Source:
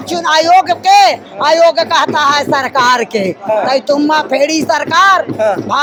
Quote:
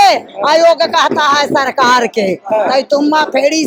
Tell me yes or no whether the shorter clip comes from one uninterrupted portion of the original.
yes